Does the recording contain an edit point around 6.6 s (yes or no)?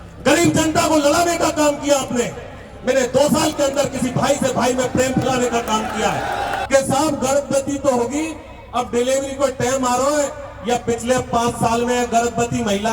yes